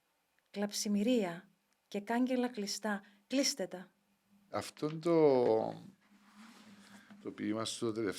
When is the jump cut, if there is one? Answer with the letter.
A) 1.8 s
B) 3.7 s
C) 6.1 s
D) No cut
D